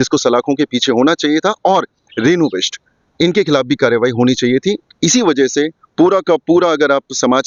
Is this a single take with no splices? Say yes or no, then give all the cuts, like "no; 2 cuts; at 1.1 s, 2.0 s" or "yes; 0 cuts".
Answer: yes; 0 cuts